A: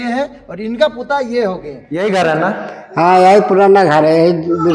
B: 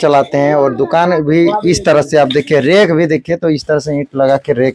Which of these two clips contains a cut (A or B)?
A